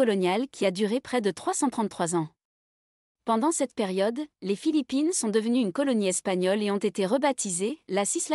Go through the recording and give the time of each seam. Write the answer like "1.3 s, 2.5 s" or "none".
none

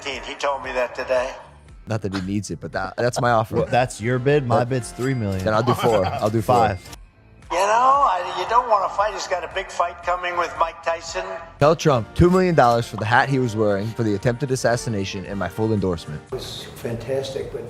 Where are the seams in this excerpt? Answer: 1.8 s, 6.8 s, 11.5 s, 16.4 s

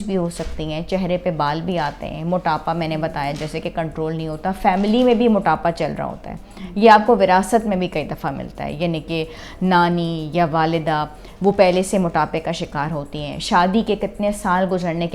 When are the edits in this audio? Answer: none

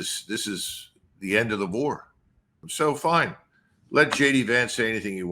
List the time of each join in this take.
2.6 s

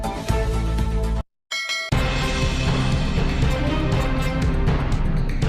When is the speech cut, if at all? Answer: 1.3 s

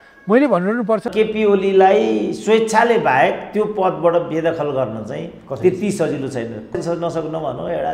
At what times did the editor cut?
1.1 s, 6.7 s

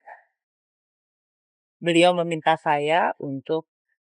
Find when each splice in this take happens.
none

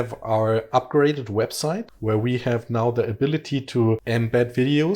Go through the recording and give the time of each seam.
1.9 s, 4.0 s

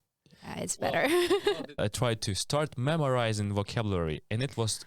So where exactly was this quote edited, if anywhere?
1.7 s

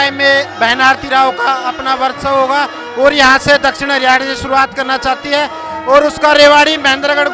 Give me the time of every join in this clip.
none

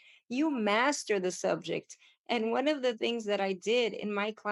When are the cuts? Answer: none

